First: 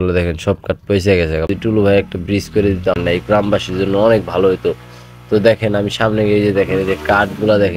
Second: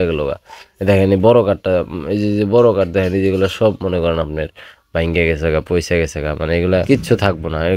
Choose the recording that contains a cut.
first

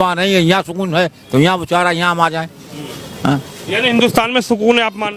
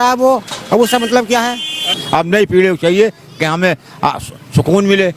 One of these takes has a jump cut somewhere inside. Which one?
second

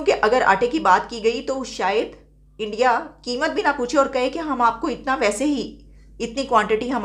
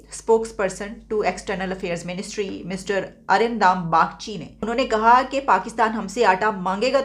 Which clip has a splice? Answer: second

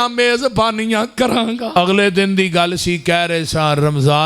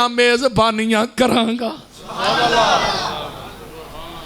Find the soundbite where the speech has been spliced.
first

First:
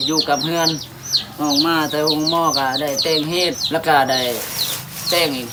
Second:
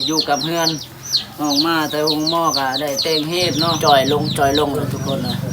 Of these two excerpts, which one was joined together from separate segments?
second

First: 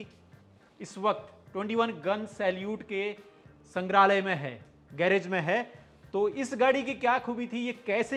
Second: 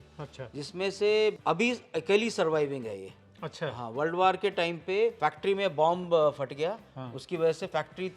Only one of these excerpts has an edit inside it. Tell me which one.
second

